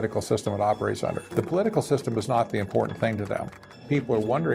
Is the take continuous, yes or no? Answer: no